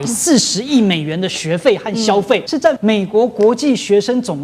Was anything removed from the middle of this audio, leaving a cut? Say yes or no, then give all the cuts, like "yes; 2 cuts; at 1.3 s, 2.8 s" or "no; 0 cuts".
yes; 1 cut; at 2.7 s